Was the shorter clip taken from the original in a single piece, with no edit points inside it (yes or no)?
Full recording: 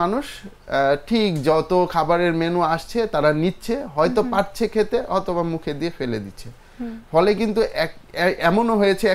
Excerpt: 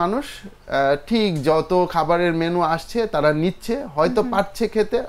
yes